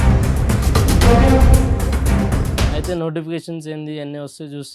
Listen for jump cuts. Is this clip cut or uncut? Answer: cut